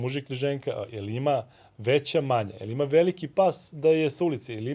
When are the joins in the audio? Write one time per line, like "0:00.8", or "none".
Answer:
none